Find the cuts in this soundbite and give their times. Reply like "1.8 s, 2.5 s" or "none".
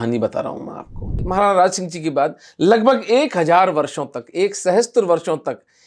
1.2 s